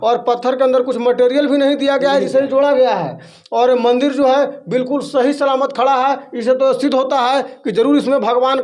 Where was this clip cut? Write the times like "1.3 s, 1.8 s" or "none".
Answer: none